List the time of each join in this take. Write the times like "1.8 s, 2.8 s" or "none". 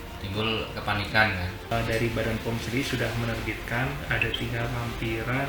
1.7 s